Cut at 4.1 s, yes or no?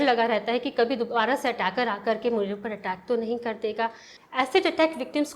yes